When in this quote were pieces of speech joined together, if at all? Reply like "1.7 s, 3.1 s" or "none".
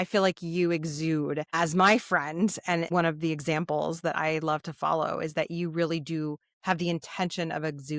1.5 s, 2.9 s